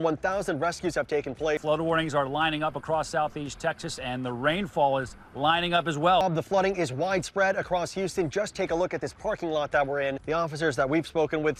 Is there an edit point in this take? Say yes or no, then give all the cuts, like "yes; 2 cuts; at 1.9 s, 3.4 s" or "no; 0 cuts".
no; 0 cuts